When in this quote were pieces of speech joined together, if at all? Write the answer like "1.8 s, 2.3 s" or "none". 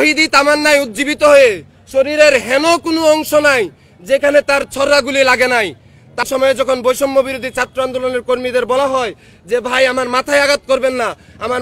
6.2 s

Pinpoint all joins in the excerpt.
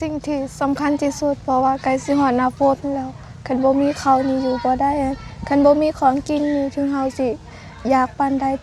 none

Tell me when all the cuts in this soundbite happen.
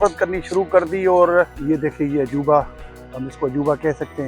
1.6 s

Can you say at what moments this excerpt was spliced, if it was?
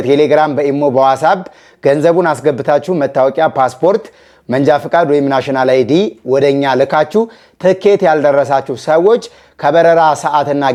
none

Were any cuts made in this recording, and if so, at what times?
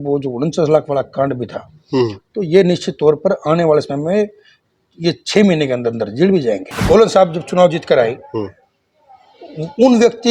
6.7 s

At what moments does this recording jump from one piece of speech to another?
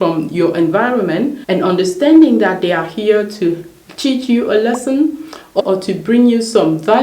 1.4 s, 5.6 s

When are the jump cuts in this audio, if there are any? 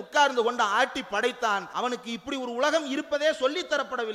1.7 s

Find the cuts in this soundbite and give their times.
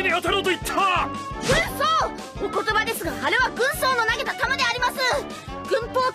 4.8 s

